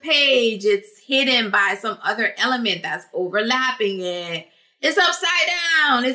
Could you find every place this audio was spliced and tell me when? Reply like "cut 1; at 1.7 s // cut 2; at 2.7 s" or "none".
none